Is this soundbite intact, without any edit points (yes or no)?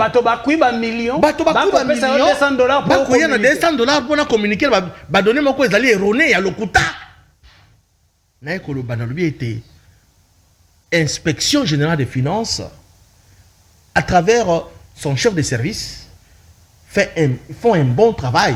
yes